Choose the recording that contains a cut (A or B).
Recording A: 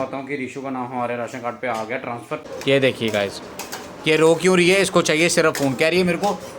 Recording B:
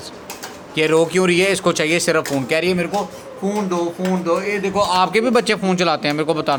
A